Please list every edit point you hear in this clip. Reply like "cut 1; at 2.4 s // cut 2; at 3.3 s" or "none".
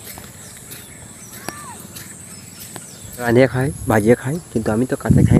cut 1; at 3.3 s